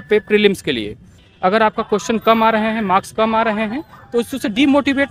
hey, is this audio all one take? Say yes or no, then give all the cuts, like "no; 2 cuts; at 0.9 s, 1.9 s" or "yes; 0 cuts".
yes; 0 cuts